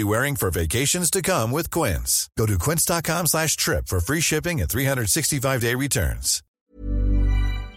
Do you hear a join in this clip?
yes; 1 cut; at 6.6 s

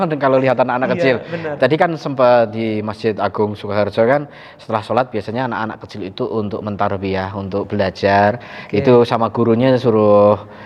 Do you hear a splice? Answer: no; 0 cuts

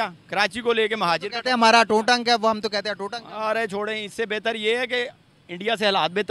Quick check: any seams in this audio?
no; 0 cuts

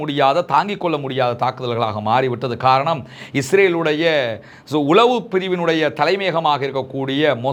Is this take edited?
no; 0 cuts

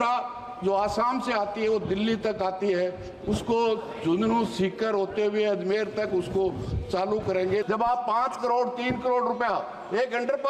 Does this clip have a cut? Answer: yes; 1 cut; at 7.6 s

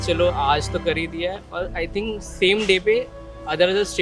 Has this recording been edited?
no; 0 cuts

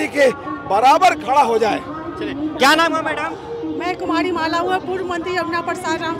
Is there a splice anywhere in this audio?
no; 0 cuts

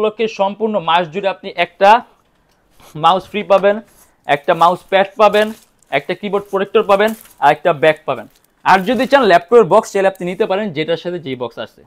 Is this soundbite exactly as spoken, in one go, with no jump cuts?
yes; 0 cuts

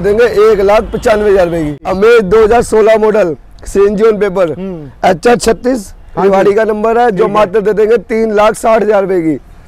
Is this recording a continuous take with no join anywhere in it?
no; 1 cut; at 1.8 s

